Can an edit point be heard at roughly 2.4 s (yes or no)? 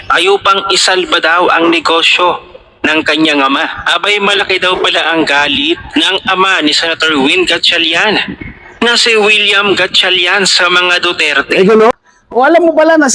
no